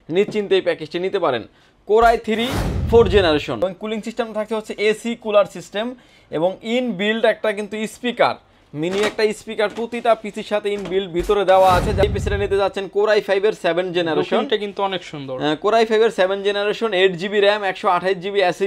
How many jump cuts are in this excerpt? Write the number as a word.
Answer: two